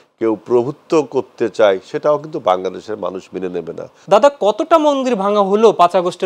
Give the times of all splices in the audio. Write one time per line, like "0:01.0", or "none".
0:03.9